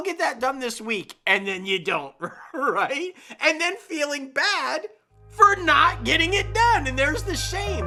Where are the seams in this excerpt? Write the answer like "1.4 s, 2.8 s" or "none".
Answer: none

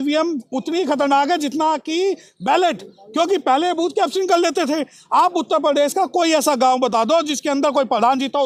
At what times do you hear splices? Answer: none

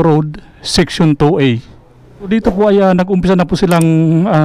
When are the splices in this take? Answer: 2.3 s

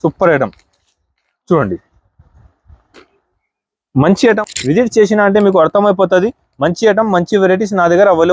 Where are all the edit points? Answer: 4.4 s

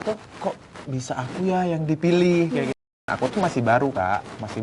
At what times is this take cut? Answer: 2.9 s

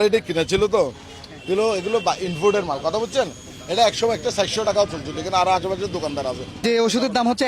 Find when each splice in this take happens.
6.5 s

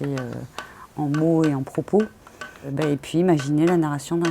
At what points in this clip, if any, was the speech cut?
2.7 s

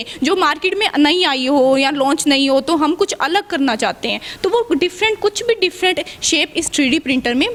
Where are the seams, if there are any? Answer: none

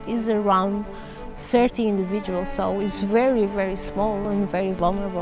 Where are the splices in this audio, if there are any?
4.3 s

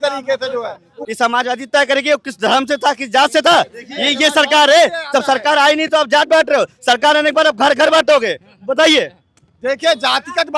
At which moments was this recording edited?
1.0 s

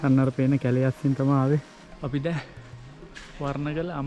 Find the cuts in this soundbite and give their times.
1.8 s

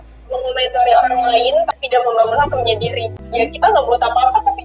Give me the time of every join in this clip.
1.8 s

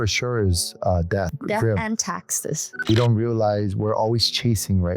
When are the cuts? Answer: 1.3 s, 2.9 s

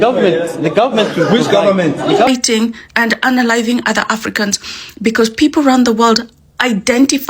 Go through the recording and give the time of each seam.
2.3 s

